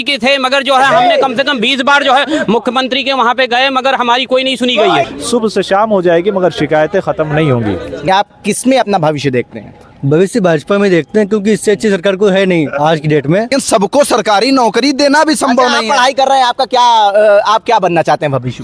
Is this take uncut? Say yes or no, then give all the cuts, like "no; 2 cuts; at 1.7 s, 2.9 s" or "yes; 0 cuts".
no; 2 cuts; at 5.1 s, 13.5 s